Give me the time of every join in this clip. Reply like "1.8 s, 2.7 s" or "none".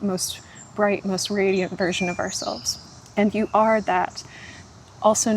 none